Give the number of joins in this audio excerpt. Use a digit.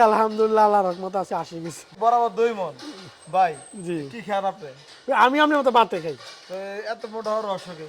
1